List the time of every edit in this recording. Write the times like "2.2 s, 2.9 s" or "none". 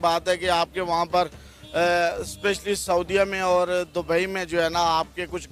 none